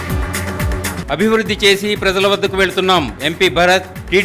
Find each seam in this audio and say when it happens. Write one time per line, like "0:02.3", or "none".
0:01.0

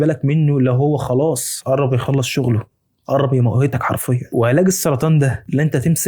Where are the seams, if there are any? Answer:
0:04.2

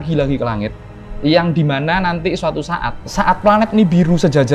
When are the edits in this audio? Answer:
0:03.0

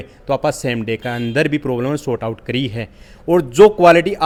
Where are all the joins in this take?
none

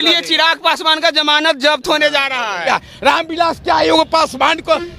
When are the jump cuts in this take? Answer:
0:02.7

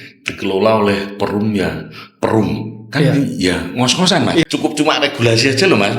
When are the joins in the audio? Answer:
0:04.4

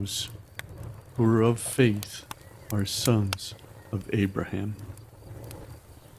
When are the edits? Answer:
0:04.8

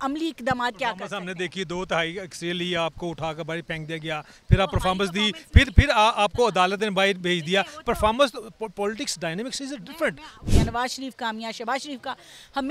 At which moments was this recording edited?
0:10.5

